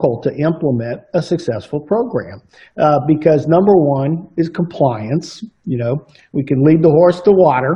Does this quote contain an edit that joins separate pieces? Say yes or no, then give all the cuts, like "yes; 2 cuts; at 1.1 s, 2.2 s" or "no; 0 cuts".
no; 0 cuts